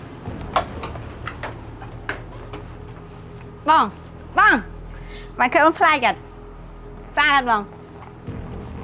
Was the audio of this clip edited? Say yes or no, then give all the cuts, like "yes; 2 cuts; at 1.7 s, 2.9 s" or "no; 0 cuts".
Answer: yes; 1 cut; at 7.8 s